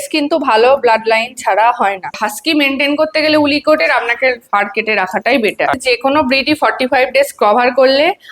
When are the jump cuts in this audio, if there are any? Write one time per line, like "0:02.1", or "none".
0:02.1
0:05.7